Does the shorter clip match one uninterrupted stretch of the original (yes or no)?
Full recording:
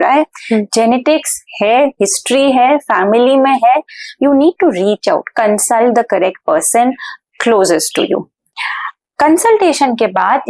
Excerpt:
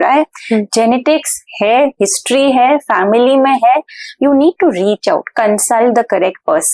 yes